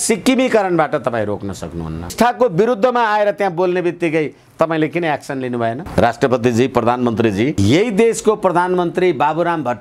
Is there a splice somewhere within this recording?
yes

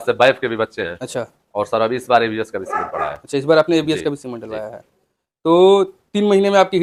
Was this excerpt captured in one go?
yes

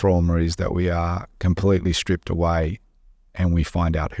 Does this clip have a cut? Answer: no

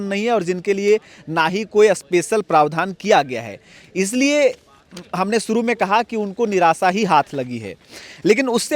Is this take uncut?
yes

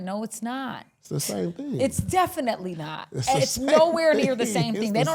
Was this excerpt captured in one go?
yes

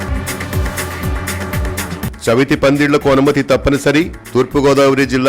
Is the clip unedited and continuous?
no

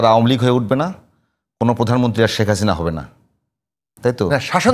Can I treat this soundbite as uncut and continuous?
yes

